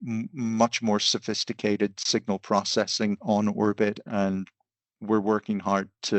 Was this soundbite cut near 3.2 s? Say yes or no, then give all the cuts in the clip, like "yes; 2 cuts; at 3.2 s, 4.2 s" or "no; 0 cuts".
yes; 1 cut; at 3.2 s